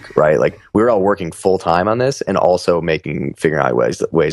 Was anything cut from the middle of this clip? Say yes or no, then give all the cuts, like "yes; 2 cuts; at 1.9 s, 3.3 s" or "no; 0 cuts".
no; 0 cuts